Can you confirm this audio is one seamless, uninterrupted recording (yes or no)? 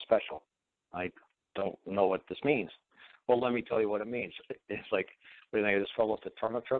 yes